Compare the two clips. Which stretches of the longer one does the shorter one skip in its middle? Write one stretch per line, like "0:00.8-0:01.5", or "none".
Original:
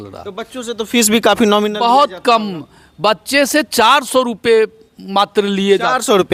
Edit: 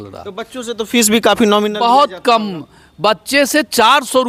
none